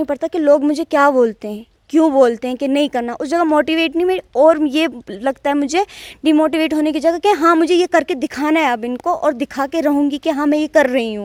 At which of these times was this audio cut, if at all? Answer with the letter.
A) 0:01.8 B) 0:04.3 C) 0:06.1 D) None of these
D